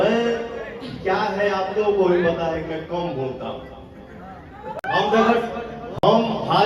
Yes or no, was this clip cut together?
no